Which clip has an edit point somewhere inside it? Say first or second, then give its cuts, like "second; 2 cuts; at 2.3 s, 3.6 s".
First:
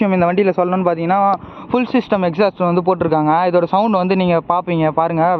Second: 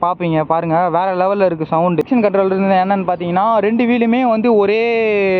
second; 1 cut; at 2.0 s